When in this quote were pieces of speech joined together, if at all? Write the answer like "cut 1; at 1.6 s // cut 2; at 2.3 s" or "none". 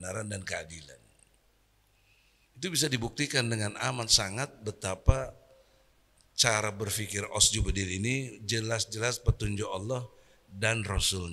none